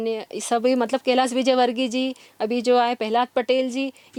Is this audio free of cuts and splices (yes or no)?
yes